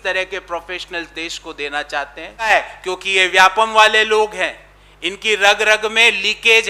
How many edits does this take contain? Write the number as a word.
one